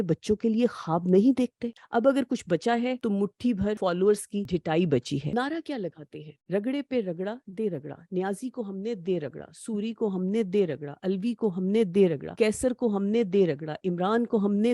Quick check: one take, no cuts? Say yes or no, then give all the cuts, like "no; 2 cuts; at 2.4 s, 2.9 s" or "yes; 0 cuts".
no; 4 cuts; at 1.6 s, 3.5 s, 4.5 s, 5.3 s